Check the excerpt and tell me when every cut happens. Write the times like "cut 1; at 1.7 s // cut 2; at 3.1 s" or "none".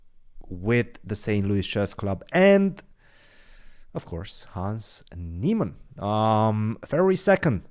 none